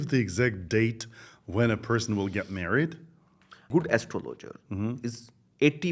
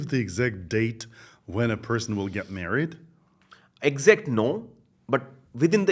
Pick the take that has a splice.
first; 1 cut; at 3.6 s

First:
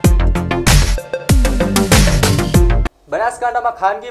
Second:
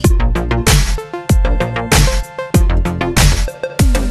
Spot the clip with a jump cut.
first; 1 cut; at 2.7 s

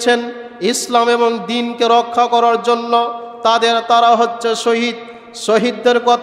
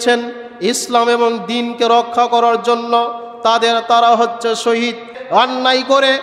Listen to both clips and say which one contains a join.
second; 1 cut; at 5.2 s

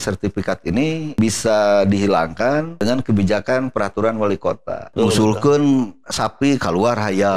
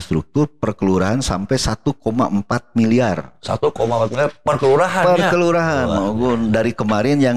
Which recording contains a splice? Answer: first; 3 cuts; at 1.2 s, 2.7 s, 4.9 s

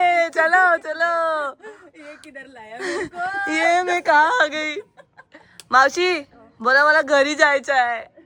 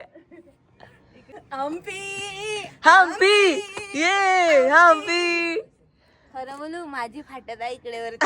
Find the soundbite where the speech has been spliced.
second; 1 cut; at 1.3 s

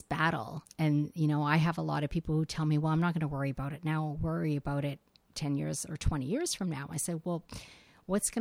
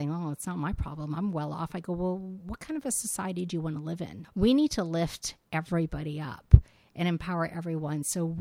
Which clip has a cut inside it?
second; 1 cut; at 4.2 s

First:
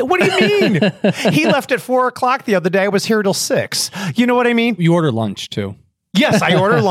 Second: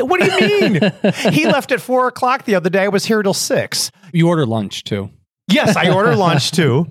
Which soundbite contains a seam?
second; 1 cut; at 4.1 s

